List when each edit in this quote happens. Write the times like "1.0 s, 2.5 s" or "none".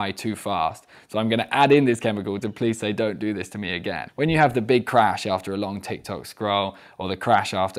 4.0 s